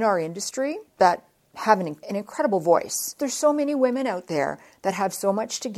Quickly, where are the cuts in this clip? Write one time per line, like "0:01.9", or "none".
0:00.8
0:02.0
0:03.1